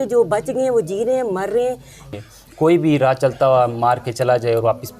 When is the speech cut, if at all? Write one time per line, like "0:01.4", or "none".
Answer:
0:02.0